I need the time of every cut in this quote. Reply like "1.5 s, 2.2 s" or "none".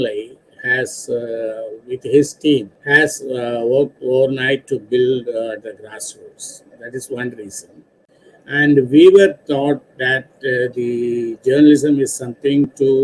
2.8 s, 8.1 s